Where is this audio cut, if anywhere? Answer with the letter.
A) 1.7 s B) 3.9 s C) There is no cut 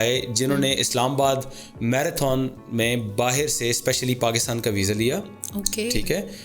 C